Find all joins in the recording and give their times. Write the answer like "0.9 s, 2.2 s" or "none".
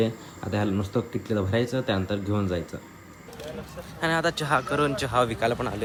none